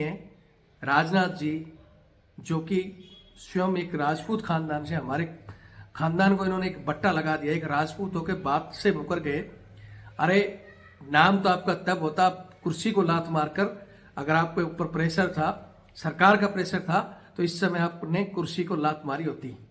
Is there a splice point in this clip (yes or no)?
no